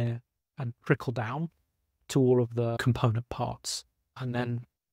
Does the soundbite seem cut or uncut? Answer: cut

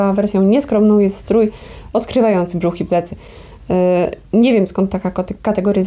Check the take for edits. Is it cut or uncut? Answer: uncut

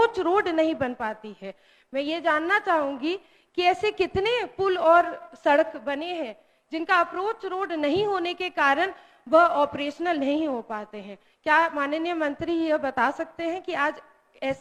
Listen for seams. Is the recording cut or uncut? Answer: uncut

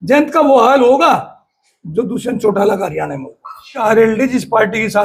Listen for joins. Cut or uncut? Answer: cut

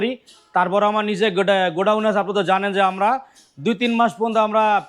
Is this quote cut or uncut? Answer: uncut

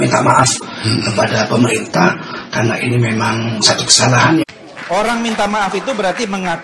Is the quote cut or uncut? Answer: cut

